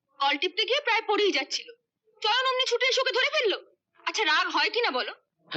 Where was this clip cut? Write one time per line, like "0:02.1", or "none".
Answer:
none